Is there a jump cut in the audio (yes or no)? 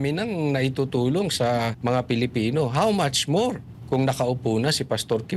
yes